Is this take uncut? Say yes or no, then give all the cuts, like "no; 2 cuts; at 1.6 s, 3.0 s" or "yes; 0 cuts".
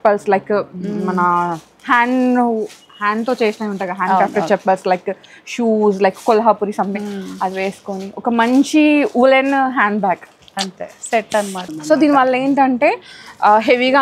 no; 1 cut; at 11.6 s